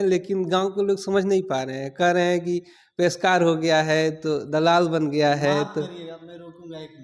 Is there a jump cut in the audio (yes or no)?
no